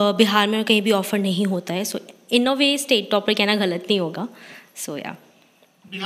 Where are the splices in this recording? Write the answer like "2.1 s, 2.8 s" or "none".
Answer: none